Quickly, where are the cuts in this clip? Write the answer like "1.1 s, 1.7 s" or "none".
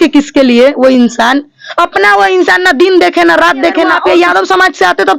4.0 s